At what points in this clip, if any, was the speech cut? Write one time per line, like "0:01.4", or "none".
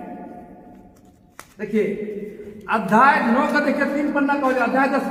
none